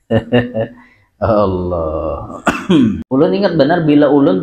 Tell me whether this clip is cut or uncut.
cut